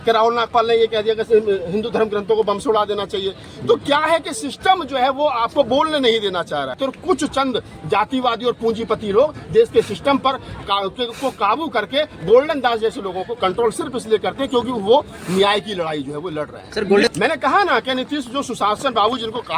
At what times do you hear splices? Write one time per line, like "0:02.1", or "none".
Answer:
0:06.8
0:17.1